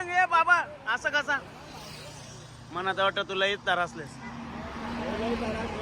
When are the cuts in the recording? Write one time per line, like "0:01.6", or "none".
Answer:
none